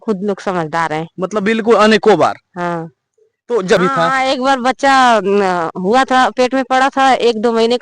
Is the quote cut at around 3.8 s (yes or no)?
yes